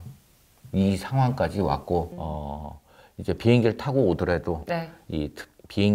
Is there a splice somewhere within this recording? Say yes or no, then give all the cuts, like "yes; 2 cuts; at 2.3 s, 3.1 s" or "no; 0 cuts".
yes; 1 cut; at 2.1 s